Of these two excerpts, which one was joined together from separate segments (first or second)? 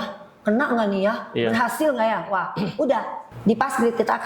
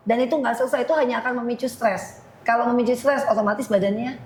first